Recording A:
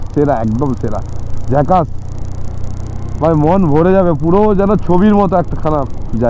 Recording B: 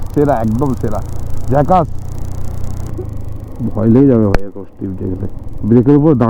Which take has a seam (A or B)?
B